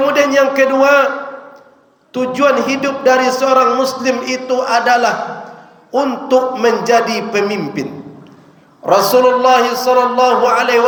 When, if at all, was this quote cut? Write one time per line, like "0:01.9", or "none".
none